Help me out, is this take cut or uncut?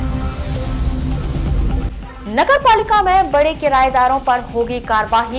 cut